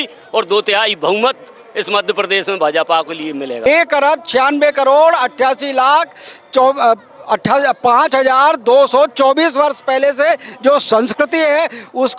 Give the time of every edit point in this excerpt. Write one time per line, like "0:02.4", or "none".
0:03.7